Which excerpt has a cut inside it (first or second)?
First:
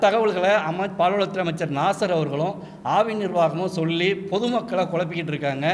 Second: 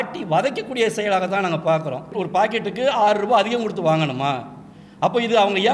second